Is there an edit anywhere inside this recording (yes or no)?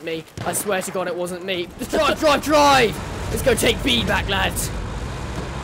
yes